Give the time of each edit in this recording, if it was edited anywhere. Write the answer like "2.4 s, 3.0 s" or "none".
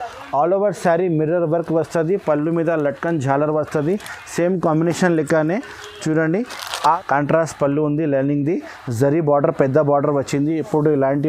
6.9 s